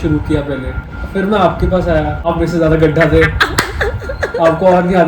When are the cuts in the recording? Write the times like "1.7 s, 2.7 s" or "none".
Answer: 0.9 s, 2.3 s